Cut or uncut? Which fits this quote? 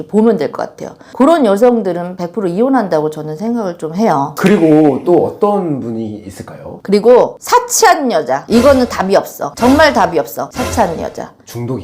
uncut